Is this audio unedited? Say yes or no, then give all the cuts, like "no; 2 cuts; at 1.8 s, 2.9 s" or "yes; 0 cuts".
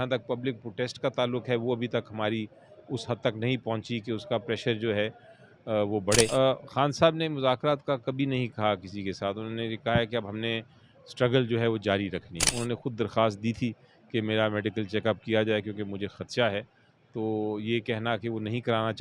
no; 2 cuts; at 6.3 s, 12.4 s